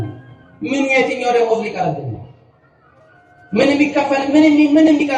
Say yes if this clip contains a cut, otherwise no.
no